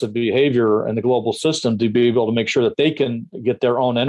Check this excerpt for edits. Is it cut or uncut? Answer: uncut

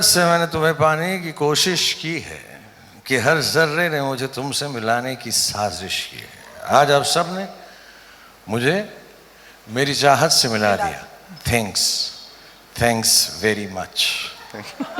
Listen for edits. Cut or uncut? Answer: uncut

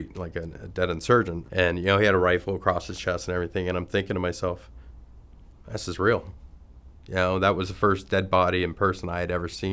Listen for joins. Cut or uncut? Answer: cut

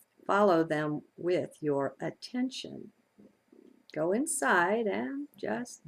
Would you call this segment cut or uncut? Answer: cut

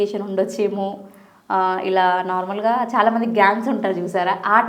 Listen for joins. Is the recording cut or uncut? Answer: uncut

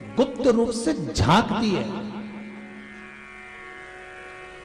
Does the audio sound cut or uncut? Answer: uncut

